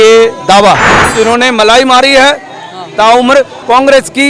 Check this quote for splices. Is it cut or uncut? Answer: cut